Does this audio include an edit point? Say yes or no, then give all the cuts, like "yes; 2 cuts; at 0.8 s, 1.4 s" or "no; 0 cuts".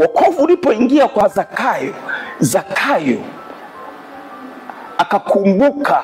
yes; 1 cut; at 1.2 s